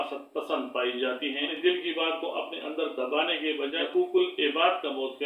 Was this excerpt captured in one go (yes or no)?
no